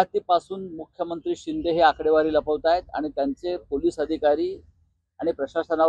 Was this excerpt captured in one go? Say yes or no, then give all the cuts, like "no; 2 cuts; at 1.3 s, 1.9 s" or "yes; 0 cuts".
yes; 0 cuts